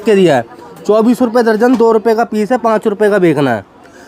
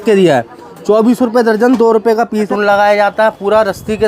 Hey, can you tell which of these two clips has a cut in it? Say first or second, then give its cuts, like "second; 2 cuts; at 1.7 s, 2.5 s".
second; 1 cut; at 2.5 s